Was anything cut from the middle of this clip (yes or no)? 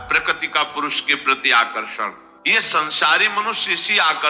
yes